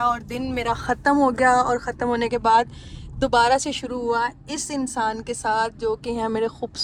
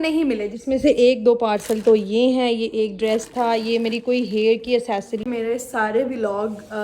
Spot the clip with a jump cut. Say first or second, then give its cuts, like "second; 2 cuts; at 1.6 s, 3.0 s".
second; 1 cut; at 5.2 s